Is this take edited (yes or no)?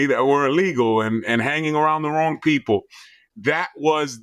no